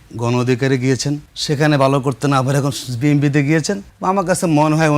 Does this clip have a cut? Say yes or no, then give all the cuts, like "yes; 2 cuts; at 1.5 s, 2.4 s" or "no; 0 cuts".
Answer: yes; 2 cuts; at 1.3 s, 3.9 s